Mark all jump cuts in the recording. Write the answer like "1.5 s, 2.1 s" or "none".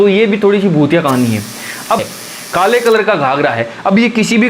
2.0 s